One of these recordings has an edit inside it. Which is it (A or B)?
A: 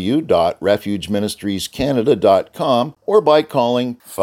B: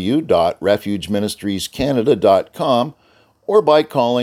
A